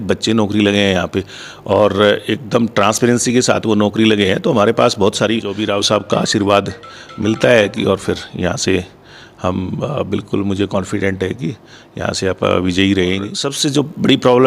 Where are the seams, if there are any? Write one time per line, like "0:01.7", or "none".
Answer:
0:05.6
0:13.5